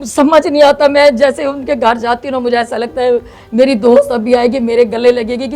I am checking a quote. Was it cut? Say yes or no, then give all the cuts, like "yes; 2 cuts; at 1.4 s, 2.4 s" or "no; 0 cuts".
no; 0 cuts